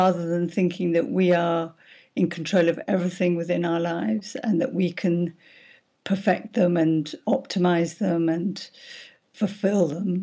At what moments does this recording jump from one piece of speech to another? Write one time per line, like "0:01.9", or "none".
0:09.3